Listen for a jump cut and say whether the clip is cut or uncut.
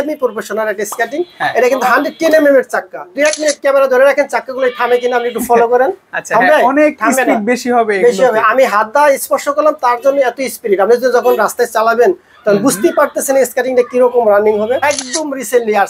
cut